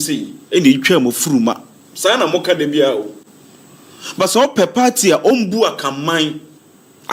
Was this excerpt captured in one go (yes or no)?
yes